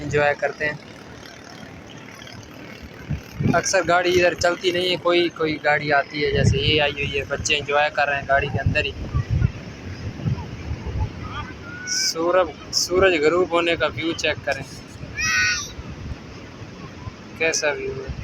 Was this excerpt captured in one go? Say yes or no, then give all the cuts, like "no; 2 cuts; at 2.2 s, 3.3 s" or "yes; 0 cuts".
yes; 0 cuts